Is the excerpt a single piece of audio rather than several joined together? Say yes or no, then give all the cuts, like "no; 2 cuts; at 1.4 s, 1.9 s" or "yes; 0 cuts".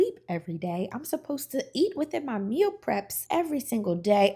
no; 1 cut; at 3.1 s